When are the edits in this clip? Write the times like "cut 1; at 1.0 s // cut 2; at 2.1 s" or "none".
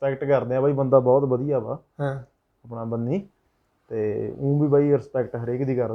none